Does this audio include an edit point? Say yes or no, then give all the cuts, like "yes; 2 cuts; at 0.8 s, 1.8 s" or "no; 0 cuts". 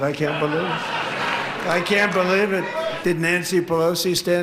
yes; 2 cuts; at 1.6 s, 3.0 s